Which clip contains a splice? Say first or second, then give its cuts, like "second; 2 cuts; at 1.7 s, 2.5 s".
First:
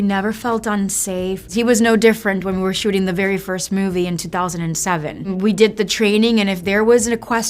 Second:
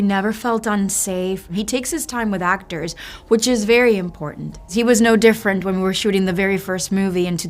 second; 2 cuts; at 1.4 s, 4.6 s